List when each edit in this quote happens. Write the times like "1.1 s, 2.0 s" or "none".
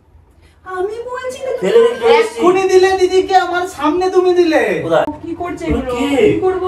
5.2 s